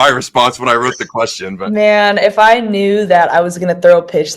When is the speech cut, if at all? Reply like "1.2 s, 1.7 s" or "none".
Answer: 1.6 s